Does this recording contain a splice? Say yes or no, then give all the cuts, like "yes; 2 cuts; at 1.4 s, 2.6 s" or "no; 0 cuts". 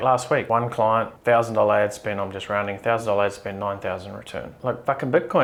no; 0 cuts